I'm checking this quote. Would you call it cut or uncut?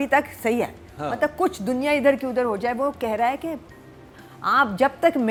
uncut